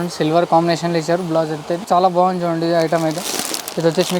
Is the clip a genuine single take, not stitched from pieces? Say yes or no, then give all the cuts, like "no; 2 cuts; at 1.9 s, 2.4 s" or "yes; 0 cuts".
yes; 0 cuts